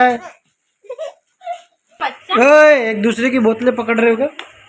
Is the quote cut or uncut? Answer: cut